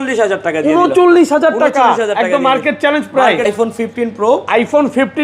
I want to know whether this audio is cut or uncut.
cut